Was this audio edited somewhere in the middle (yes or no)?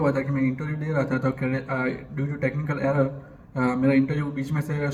no